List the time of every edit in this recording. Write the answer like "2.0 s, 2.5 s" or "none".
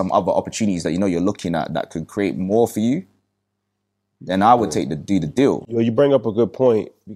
none